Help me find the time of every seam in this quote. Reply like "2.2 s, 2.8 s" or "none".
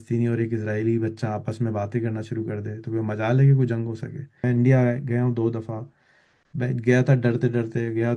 4.4 s